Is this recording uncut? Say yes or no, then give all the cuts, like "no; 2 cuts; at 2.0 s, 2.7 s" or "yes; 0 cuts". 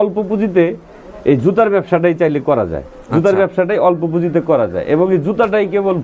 yes; 0 cuts